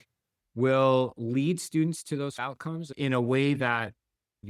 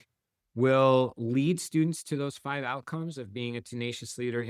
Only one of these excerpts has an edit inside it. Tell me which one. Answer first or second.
first